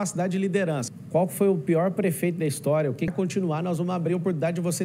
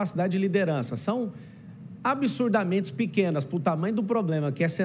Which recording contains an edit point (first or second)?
first